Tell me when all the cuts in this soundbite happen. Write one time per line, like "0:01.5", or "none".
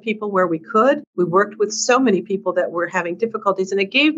0:01.1